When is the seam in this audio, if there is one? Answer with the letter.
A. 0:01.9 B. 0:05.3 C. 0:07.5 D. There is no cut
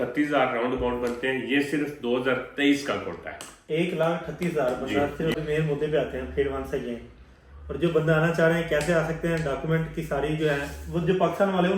B